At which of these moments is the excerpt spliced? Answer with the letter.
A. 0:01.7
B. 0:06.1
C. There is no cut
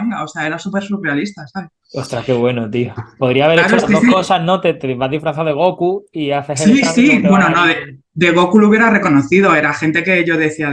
C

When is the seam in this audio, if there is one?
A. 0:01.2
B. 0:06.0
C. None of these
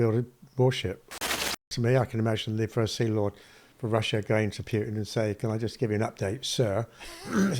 A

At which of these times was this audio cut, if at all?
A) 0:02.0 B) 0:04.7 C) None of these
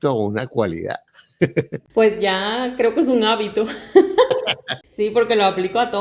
B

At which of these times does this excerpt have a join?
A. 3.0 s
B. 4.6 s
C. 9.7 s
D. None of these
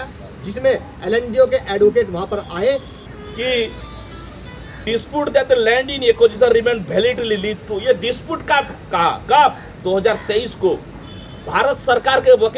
A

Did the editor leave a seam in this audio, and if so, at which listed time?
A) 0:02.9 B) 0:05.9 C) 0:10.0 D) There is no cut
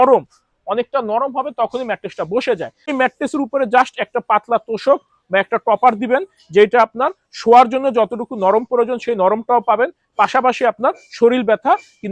A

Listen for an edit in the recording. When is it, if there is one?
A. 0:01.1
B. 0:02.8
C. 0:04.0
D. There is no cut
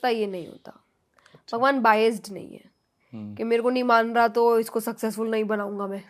D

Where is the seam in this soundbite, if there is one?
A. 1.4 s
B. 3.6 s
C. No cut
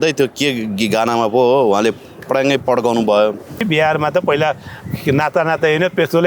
B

